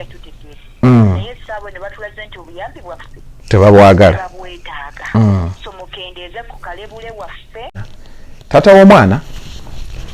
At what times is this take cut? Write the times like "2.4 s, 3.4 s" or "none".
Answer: 7.7 s